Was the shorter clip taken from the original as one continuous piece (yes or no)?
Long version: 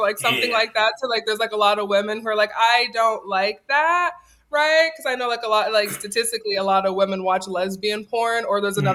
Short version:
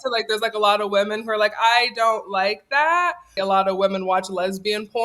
no